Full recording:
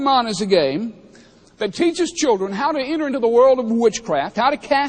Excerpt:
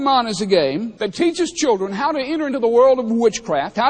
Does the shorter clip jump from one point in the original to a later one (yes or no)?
yes